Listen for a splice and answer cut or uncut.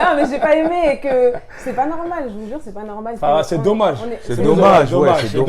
uncut